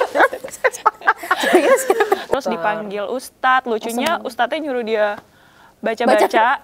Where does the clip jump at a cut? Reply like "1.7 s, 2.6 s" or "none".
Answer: 2.3 s